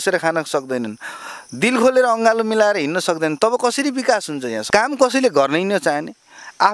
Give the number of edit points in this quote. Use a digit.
1